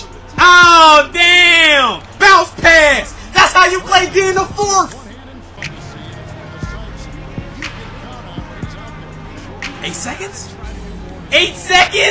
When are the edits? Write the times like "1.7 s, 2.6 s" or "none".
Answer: 5.6 s